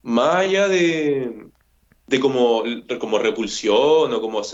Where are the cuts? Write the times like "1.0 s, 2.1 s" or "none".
none